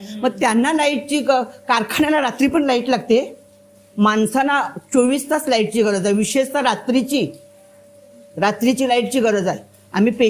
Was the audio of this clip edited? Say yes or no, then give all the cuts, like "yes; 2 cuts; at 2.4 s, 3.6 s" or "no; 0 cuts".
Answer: no; 0 cuts